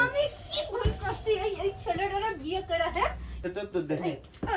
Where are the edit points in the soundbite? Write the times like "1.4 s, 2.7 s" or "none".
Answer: none

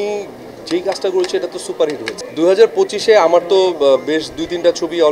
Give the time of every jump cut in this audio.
2.1 s

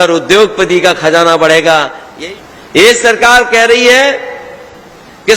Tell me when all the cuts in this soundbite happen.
2.0 s

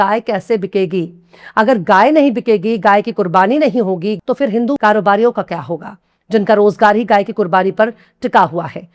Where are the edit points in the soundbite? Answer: 4.2 s

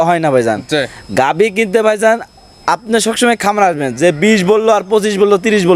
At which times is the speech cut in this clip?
none

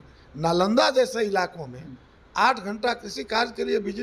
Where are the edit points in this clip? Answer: none

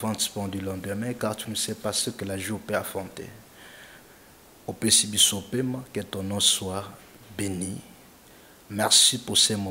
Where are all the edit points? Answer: none

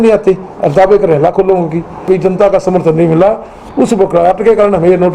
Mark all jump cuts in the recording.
2.0 s

